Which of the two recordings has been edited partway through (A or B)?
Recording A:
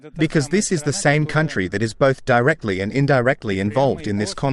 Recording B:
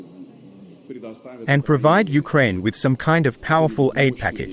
B